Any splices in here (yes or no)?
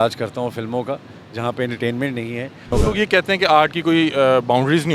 yes